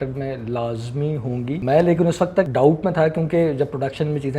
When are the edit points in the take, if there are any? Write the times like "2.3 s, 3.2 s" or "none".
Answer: 1.6 s, 2.5 s

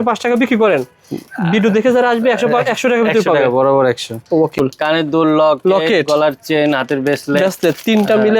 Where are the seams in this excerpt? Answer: 4.6 s

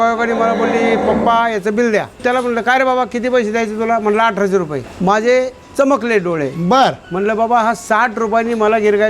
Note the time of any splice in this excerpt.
2.2 s, 4.8 s

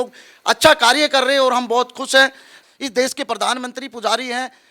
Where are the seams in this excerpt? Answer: 2.5 s

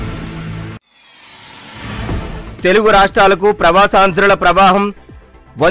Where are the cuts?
2.1 s

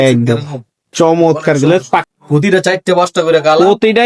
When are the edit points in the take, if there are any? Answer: 2.1 s

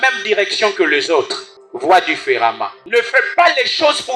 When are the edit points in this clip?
none

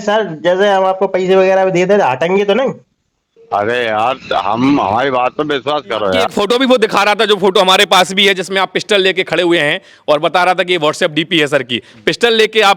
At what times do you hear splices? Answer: 6.3 s

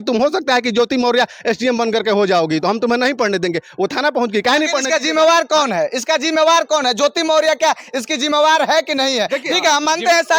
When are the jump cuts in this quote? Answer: none

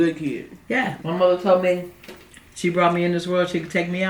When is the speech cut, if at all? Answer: 1.0 s

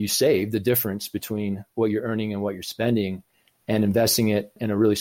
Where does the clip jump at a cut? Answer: none

